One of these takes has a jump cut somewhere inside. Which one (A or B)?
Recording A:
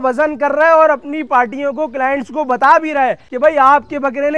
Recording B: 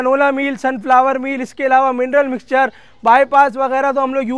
A